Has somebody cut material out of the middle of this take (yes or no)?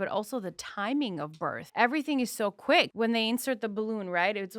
yes